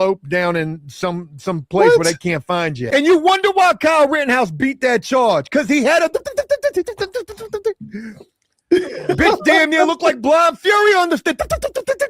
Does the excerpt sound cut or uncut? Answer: cut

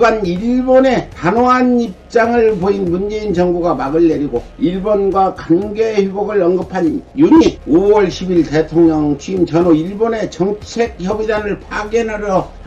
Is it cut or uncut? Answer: uncut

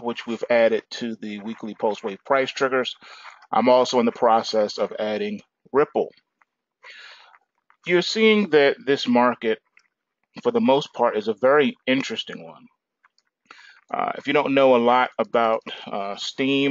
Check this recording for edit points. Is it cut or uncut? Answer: cut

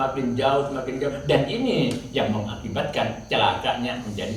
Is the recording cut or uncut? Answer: uncut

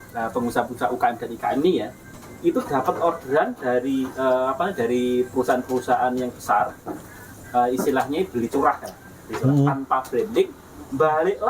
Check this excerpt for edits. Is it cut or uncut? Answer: uncut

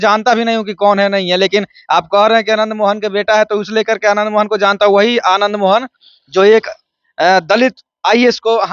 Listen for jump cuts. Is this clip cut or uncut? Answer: uncut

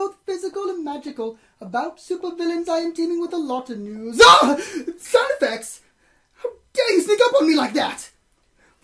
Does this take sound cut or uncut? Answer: uncut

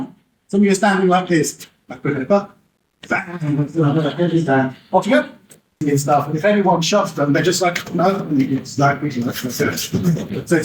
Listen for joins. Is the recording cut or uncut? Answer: cut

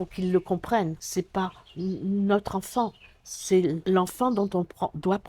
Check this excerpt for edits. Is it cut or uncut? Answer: cut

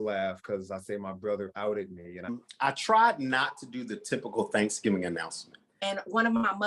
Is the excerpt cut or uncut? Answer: cut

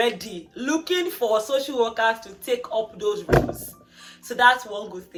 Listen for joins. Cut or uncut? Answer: uncut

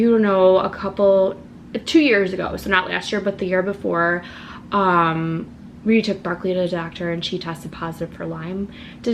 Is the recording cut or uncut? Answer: uncut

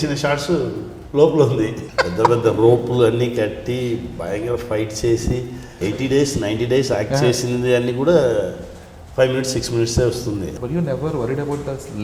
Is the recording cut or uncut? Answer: cut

